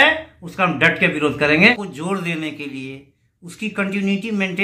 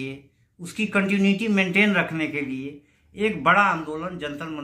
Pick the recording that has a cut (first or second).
first